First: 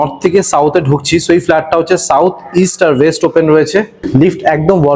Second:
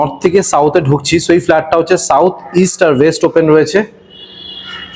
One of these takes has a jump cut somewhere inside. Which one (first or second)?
first